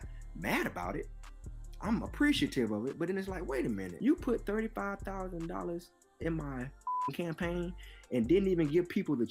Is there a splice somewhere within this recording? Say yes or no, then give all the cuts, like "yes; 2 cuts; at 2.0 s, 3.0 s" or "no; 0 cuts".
yes; 1 cut; at 3.9 s